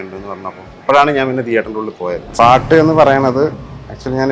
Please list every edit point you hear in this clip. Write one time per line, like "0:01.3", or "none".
0:02.2